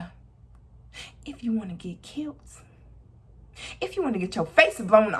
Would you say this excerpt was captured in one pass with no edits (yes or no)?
yes